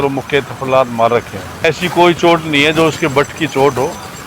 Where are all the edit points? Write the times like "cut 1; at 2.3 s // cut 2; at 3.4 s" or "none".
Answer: cut 1; at 1.7 s